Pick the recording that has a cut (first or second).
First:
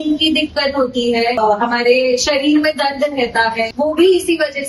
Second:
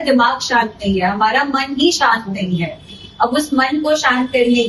first